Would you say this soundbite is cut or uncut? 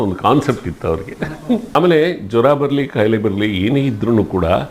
cut